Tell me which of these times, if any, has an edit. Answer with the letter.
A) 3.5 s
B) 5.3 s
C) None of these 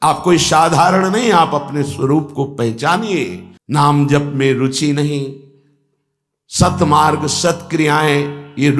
A